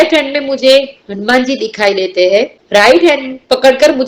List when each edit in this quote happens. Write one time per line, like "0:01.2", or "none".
0:02.6